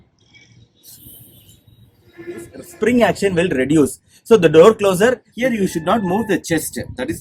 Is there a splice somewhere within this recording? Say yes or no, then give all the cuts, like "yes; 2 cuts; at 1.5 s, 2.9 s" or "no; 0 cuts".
yes; 2 cuts; at 2.6 s, 5.3 s